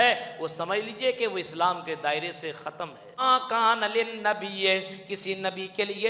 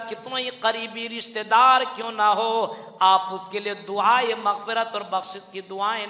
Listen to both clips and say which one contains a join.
first; 1 cut; at 3.2 s

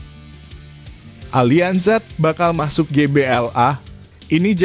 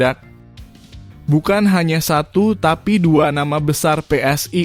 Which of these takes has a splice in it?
first; 1 cut; at 1.3 s

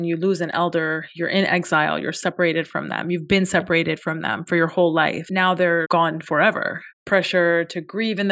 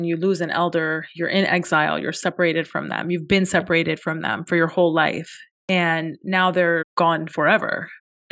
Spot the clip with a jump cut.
first; 2 cuts; at 5.7 s, 6.9 s

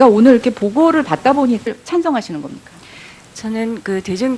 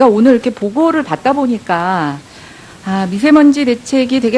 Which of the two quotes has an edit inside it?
second; 1 cut; at 1.6 s

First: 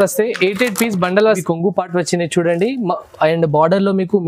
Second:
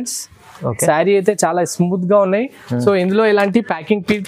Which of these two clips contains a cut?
first; 1 cut; at 1.4 s

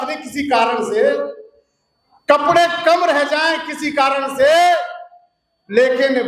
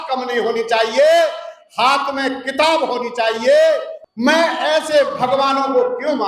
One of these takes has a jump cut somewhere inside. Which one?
second; 1 cut; at 3.9 s

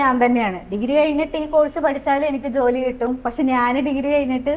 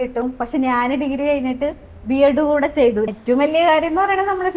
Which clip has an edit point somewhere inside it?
second; 1 cut; at 3.1 s

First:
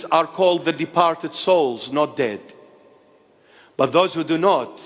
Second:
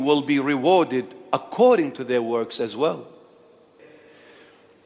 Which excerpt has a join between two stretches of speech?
second; 1 cut; at 3.8 s

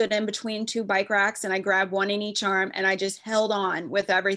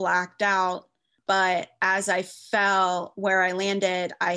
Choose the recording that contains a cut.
second; 1 cut; at 1.1 s

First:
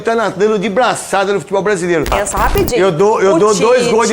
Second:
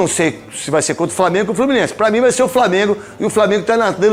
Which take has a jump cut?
first; 1 cut; at 2.1 s

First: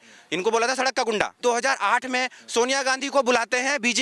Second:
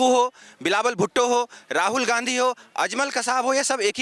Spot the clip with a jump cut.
first; 1 cut; at 1.4 s

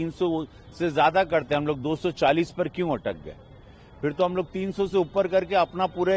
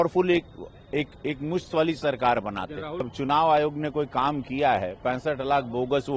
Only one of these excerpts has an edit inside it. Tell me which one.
second; 1 cut; at 3.1 s

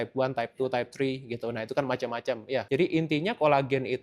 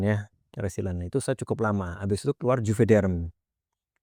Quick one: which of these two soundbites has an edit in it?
first; 1 cut; at 2.7 s

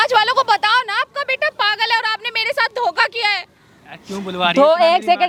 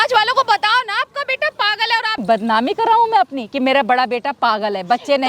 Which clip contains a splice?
second; 1 cut; at 2.2 s

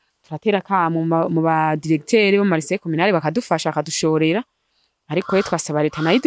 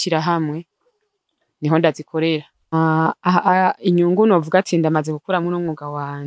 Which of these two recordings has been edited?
second; 1 cut; at 2.7 s

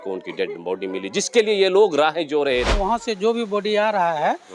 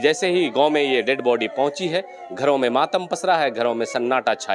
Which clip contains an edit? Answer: first; 1 cut; at 2.7 s

